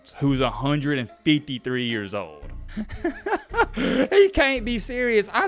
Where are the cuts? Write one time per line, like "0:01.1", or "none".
0:02.6